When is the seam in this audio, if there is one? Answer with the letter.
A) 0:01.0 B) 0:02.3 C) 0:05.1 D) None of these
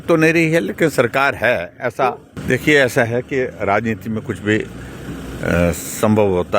B